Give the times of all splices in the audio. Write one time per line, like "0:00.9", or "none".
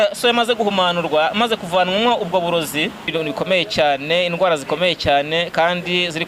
0:03.1